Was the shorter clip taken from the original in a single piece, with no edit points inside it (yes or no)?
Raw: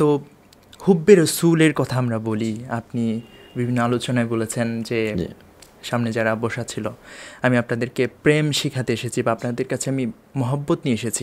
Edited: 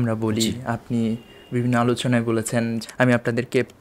no